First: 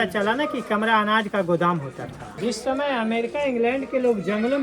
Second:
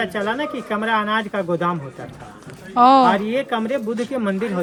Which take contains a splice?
first; 1 cut; at 2.4 s

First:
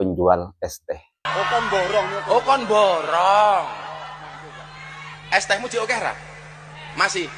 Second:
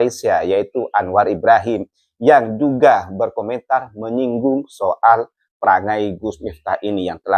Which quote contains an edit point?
first; 1 cut; at 1.2 s

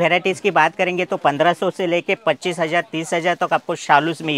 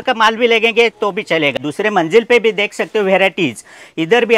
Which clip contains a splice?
second; 1 cut; at 1.6 s

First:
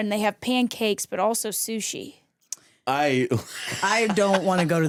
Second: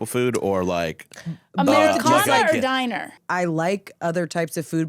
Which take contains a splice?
second; 1 cut; at 3.1 s

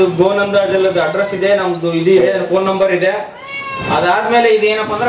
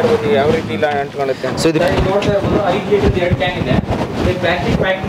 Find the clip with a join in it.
second; 1 cut; at 1.8 s

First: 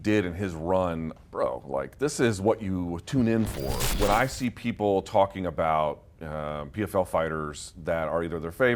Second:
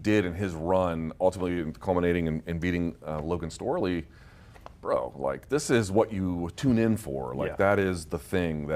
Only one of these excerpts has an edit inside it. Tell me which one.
first; 2 cuts; at 1.1 s, 3.8 s

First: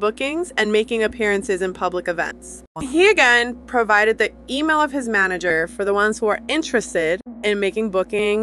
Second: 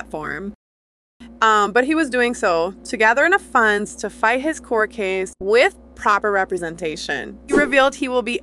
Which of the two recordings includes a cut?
second; 1 cut; at 7.5 s

